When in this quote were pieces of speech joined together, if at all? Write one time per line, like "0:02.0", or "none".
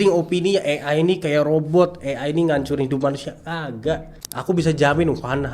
none